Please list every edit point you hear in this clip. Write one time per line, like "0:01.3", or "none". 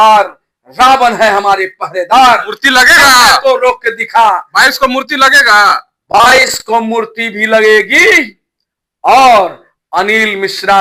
none